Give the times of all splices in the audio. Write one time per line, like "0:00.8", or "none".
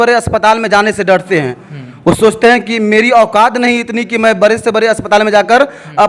none